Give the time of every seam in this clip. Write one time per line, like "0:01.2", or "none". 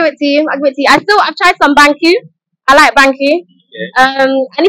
none